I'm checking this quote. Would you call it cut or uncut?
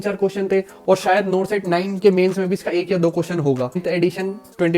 cut